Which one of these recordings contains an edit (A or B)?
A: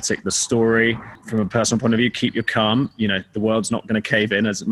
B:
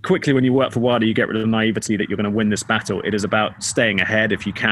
A